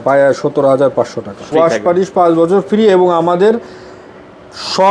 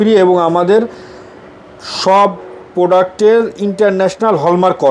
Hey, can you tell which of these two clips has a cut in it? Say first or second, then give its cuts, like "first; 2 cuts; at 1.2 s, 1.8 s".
first; 1 cut; at 1.4 s